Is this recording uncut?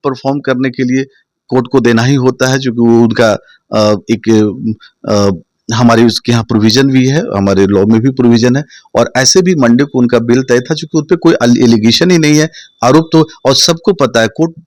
yes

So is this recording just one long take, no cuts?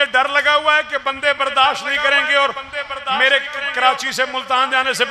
yes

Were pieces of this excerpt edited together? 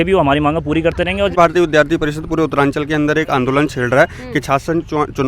yes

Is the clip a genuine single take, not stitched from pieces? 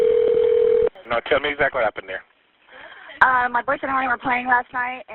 no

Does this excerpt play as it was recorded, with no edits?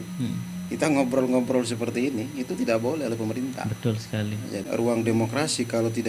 no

